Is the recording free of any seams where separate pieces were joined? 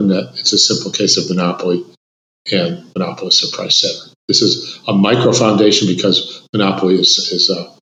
yes; 0 cuts

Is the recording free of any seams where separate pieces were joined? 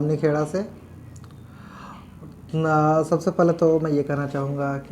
yes; 0 cuts

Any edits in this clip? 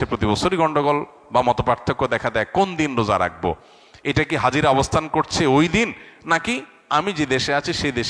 no; 0 cuts

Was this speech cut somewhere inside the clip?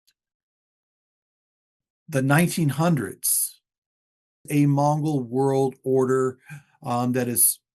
yes; 1 cut; at 4.5 s

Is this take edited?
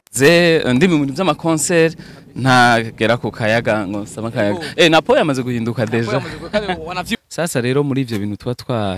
yes; 1 cut; at 7.2 s

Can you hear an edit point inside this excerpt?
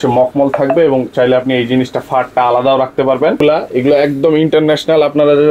yes; 1 cut; at 3.4 s

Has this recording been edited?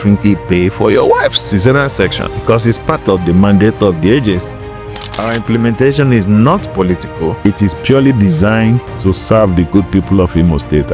yes; 3 cuts; at 2.3 s, 5.1 s, 7.4 s

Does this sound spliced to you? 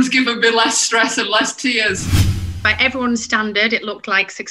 yes; 1 cut; at 2.4 s

